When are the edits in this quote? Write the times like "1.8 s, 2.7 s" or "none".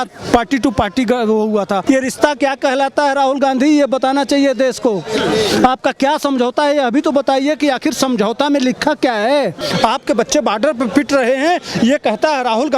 1.8 s, 9.6 s